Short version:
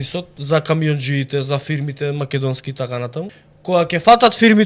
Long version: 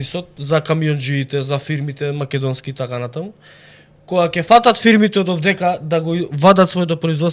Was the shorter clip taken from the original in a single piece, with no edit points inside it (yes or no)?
no